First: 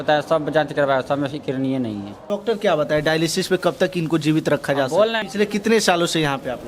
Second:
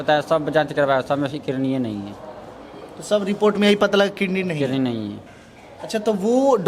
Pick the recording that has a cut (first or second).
first